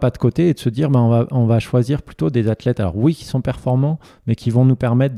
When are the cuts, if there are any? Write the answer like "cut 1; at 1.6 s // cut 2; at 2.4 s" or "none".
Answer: none